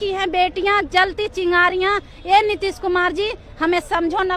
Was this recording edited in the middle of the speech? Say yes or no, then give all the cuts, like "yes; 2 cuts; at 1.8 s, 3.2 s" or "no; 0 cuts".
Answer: no; 0 cuts